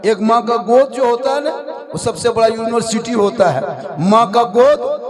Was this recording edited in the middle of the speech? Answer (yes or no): no